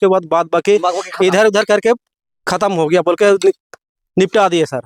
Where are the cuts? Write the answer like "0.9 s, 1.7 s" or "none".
none